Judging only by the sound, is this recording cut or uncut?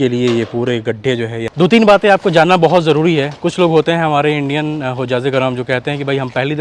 cut